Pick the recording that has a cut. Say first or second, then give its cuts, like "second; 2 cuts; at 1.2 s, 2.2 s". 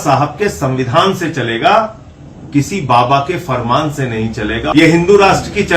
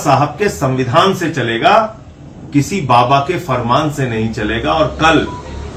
first; 1 cut; at 4.7 s